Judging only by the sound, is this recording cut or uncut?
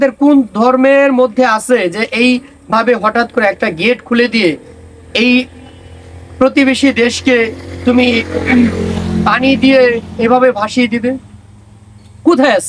uncut